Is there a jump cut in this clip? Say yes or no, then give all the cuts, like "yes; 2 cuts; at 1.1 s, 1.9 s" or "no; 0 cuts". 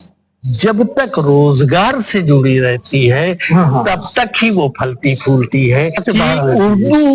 yes; 1 cut; at 6.0 s